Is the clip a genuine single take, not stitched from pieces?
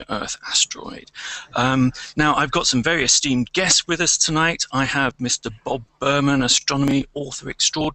no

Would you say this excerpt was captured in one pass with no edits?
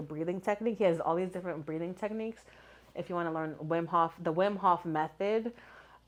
yes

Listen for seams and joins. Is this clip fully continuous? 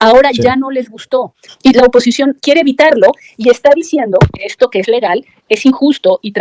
no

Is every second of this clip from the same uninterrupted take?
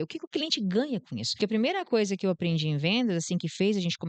no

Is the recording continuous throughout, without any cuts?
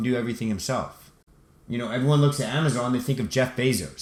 yes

